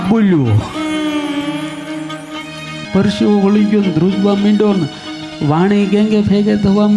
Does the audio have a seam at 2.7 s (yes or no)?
yes